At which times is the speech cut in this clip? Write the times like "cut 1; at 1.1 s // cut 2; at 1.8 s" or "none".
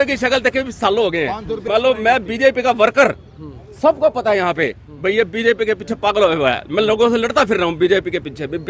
cut 1; at 1.5 s